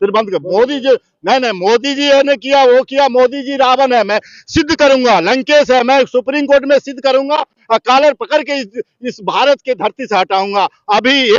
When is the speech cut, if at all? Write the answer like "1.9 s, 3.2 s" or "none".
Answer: none